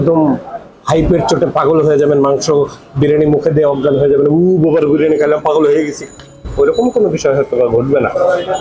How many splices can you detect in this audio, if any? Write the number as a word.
zero